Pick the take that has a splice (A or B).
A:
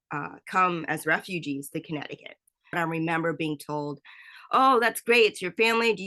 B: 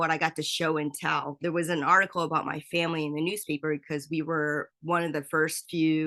A